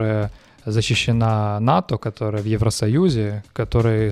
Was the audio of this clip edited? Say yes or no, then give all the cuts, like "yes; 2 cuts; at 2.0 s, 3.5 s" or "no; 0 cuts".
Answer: no; 0 cuts